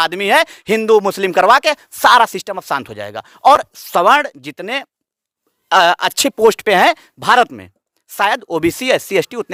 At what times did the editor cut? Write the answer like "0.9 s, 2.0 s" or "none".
none

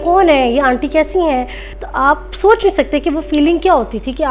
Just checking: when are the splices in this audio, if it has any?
1.6 s

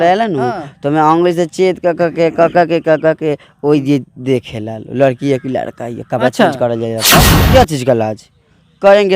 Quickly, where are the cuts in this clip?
7.3 s

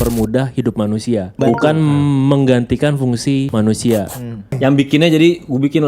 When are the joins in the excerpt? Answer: 1.3 s, 3.5 s, 4.6 s

